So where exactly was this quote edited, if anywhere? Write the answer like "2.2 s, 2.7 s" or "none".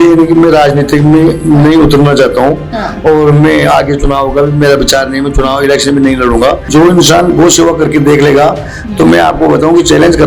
6.7 s